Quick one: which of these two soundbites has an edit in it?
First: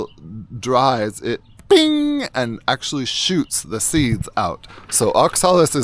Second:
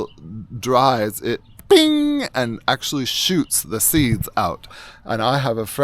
second; 1 cut; at 4.8 s

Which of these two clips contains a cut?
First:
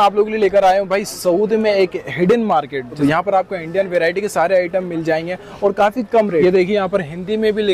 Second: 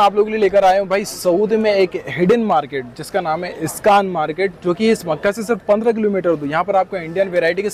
first; 2 cuts; at 3.0 s, 6.4 s

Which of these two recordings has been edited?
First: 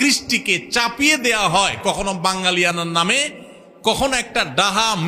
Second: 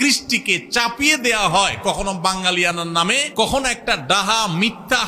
second; 1 cut; at 3.2 s

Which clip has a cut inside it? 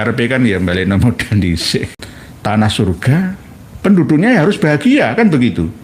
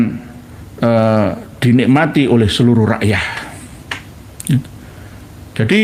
first; 1 cut; at 1.9 s

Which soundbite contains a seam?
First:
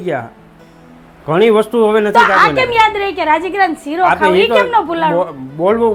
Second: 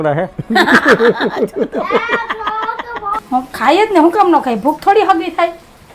second; 1 cut; at 3.1 s

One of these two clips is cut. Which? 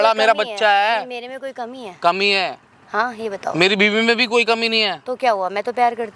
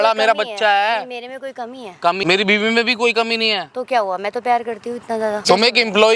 second; 2 cuts; at 2.2 s, 5.5 s

